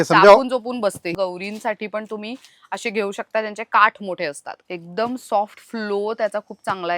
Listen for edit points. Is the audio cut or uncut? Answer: cut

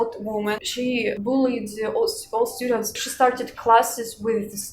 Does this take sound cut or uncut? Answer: cut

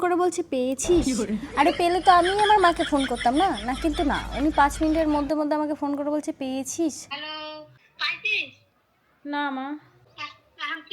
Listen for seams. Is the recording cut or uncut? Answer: cut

